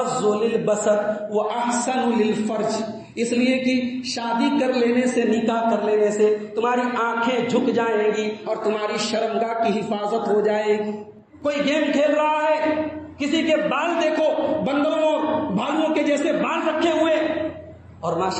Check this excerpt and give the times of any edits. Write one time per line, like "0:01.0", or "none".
0:11.3